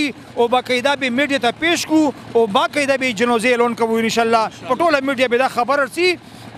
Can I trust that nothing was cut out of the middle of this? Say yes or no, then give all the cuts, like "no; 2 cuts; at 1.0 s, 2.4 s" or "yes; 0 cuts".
yes; 0 cuts